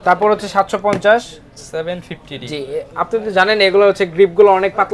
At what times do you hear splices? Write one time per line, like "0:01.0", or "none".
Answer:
none